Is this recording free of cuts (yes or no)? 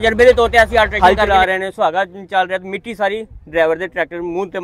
no